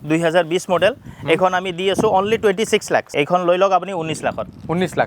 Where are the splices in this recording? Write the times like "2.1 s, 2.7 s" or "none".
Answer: 3.1 s

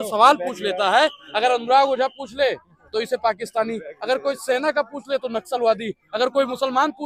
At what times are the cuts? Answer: none

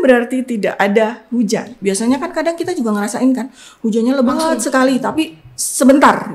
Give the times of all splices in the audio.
1.7 s

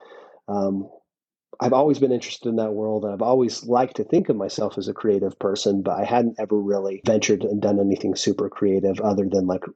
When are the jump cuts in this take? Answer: 7.0 s

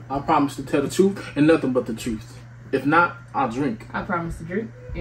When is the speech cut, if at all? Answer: none

